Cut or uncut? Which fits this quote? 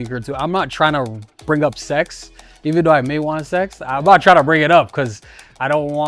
uncut